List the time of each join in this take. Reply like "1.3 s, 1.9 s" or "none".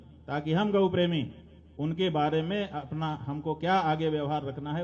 none